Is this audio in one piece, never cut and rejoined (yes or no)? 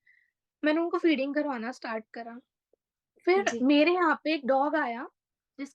yes